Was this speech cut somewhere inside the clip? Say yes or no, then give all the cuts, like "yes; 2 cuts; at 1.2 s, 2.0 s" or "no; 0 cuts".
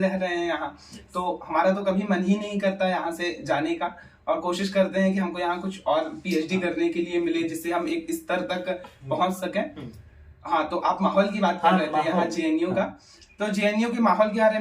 no; 0 cuts